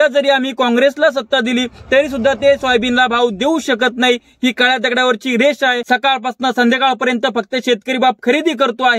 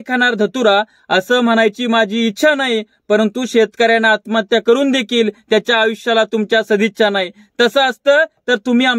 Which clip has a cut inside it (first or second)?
first